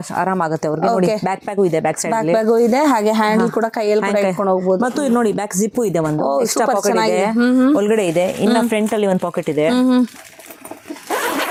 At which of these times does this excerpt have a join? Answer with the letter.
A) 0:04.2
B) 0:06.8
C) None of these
C